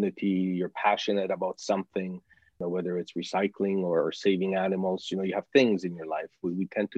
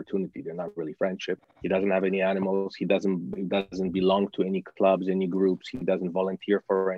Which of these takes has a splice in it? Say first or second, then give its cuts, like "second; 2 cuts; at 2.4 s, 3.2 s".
first; 1 cut; at 2.6 s